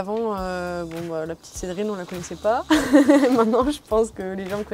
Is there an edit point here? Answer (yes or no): no